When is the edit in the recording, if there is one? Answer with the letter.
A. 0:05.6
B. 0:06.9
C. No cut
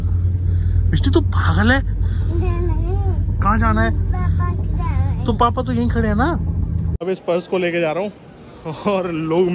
B